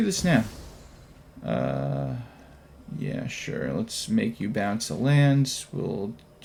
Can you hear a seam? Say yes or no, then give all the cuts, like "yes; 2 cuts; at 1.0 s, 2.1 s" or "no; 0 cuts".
no; 0 cuts